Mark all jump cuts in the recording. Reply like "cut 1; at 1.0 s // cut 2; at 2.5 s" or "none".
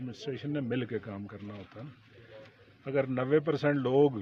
none

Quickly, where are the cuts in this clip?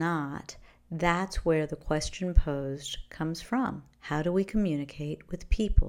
cut 1; at 3.9 s

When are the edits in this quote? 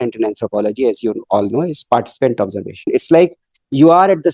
cut 1; at 2.9 s

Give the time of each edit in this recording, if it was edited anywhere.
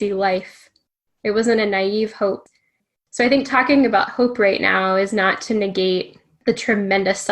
cut 1; at 2.5 s // cut 2; at 6.2 s

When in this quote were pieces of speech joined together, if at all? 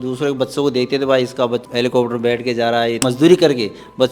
cut 1; at 1.6 s // cut 2; at 3.0 s

